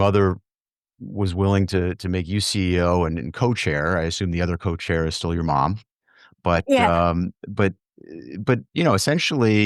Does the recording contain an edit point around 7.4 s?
no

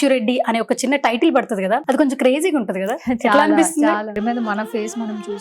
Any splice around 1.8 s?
yes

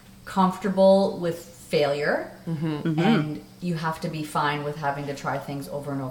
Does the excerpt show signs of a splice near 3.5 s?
no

